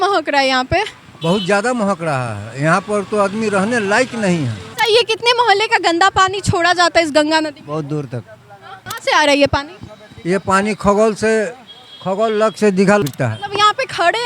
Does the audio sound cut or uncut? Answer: cut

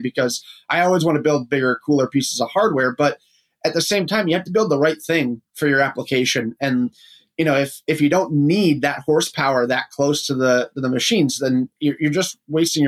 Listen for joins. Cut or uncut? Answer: uncut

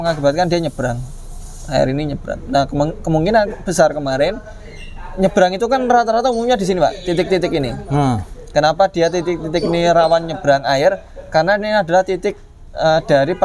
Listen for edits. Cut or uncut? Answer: uncut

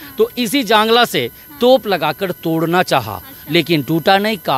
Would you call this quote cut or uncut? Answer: uncut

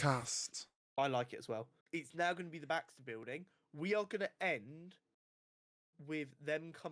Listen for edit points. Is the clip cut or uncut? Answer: cut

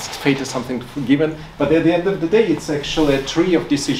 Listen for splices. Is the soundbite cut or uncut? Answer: uncut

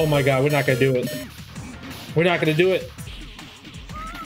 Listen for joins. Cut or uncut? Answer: cut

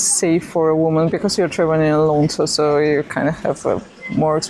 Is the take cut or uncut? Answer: uncut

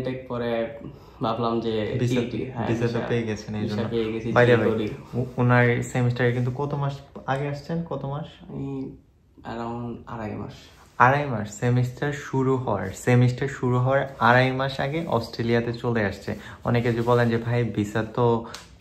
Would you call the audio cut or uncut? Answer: uncut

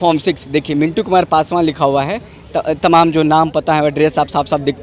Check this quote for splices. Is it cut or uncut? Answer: uncut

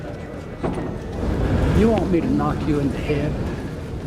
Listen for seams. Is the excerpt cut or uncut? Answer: cut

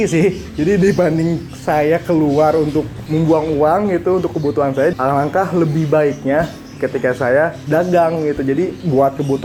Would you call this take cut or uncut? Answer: uncut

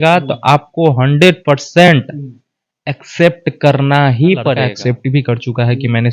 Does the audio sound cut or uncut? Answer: cut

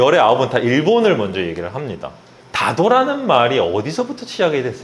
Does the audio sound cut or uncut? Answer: uncut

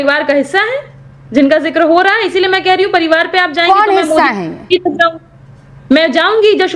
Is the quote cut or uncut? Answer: uncut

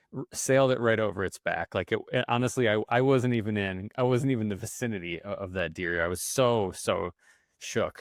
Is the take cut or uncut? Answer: uncut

